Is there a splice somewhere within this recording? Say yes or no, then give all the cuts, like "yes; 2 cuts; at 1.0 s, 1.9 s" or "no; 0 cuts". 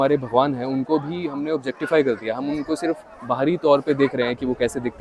no; 0 cuts